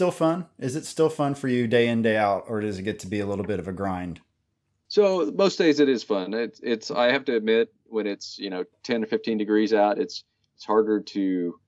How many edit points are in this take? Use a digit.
0